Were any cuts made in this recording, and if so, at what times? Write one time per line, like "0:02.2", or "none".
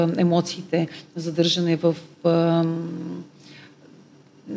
none